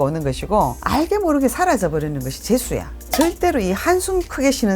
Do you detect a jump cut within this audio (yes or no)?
yes